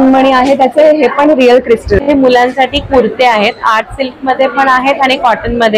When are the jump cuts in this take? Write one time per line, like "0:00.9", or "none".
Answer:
0:02.0